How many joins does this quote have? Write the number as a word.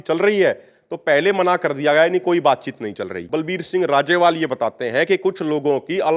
one